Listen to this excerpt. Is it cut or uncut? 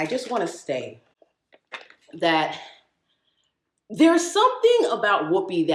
uncut